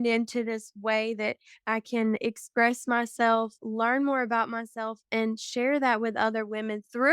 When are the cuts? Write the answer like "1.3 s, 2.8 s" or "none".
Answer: 2.2 s